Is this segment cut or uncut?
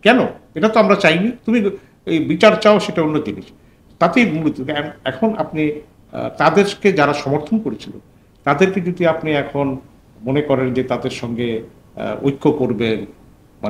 uncut